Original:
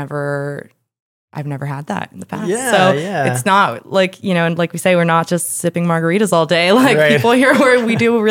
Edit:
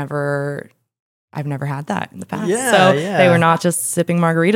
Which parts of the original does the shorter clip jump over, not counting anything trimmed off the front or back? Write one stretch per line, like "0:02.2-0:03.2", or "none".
0:03.1-0:04.8